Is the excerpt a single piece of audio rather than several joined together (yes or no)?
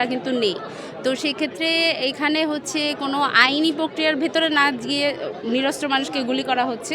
yes